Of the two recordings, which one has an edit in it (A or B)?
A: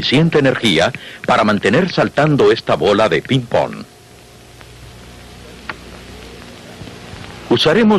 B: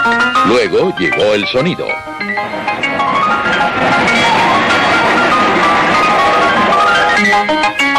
B